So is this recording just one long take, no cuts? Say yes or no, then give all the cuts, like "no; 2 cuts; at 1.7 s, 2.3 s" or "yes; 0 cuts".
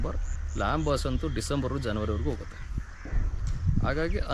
yes; 0 cuts